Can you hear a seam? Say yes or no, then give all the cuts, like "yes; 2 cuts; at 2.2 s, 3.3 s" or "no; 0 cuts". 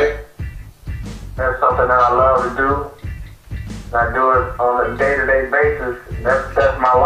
no; 0 cuts